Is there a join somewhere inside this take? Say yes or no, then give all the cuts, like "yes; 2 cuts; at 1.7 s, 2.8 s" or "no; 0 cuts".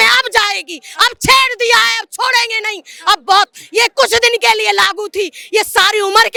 no; 0 cuts